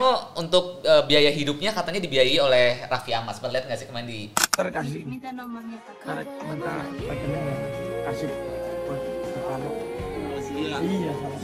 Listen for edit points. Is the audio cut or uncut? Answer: uncut